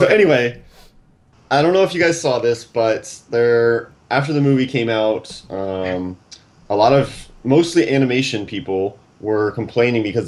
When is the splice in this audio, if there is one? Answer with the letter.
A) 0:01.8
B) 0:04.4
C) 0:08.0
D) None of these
D